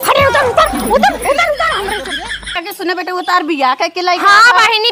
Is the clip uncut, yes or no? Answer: no